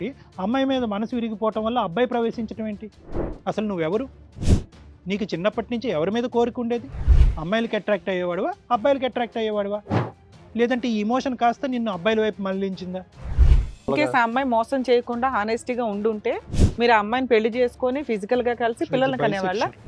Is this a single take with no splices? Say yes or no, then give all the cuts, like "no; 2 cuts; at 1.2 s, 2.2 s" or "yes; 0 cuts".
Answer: no; 1 cut; at 13.9 s